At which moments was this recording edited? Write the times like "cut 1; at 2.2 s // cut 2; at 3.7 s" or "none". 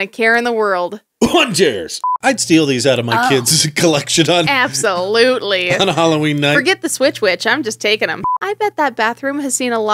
cut 1; at 2.1 s // cut 2; at 8.3 s